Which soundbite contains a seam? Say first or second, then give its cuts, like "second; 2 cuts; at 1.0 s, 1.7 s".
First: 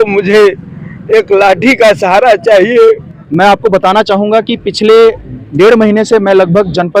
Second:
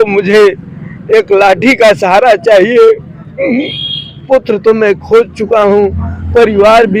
first; 1 cut; at 3.1 s